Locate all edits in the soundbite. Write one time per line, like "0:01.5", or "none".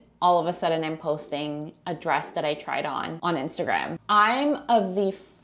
0:03.1
0:04.0